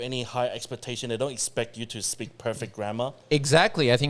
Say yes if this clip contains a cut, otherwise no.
no